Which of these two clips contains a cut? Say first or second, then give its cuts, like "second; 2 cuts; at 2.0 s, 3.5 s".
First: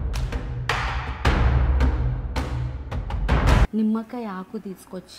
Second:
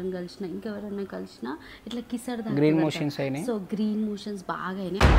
first; 1 cut; at 3.7 s